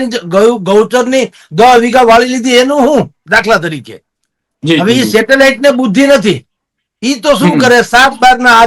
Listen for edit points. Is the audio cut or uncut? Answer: uncut